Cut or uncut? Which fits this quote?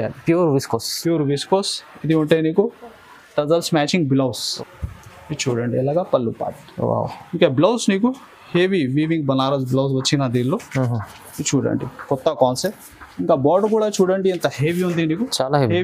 cut